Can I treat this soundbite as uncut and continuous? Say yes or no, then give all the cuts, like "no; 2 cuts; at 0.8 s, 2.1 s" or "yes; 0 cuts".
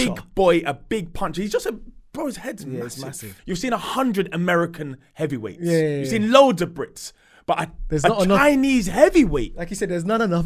no; 1 cut; at 3.3 s